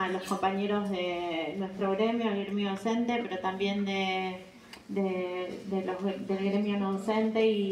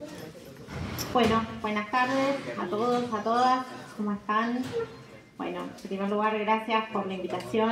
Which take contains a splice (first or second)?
second